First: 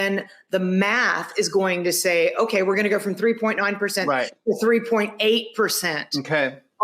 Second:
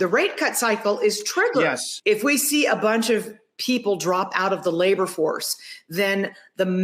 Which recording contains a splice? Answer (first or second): second